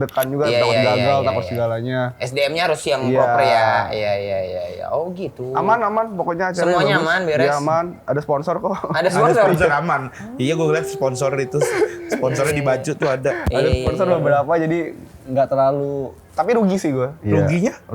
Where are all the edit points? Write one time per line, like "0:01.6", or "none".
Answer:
none